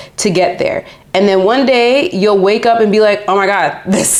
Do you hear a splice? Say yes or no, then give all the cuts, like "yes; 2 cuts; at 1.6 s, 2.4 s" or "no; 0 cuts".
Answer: no; 0 cuts